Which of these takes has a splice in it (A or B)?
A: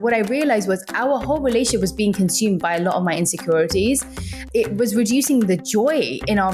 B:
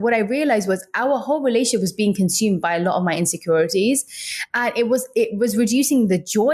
A